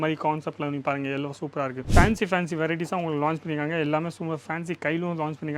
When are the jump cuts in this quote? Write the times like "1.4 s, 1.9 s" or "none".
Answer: 1.8 s